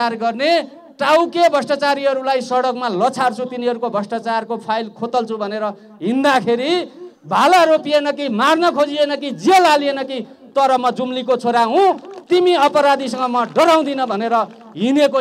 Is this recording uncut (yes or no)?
yes